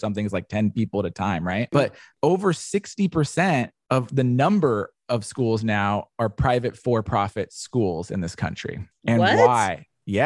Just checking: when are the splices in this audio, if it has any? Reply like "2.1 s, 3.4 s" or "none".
2.0 s, 3.8 s